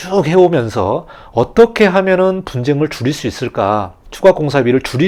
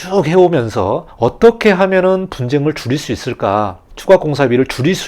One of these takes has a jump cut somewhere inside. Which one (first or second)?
second